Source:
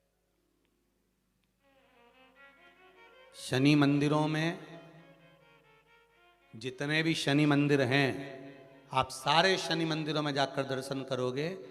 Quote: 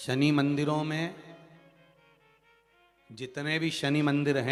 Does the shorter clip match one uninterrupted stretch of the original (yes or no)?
yes